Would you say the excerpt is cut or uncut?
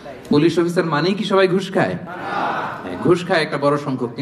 uncut